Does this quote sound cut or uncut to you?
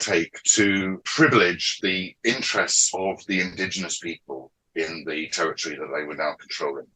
cut